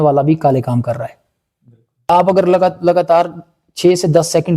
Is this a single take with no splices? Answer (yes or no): no